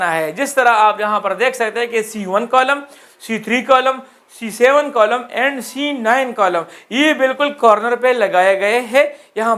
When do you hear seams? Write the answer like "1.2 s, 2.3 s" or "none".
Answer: none